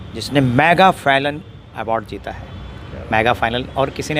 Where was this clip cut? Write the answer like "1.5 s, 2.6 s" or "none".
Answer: none